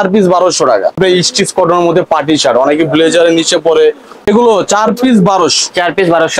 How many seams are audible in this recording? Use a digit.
2